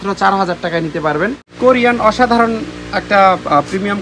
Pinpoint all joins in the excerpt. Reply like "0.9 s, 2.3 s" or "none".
1.4 s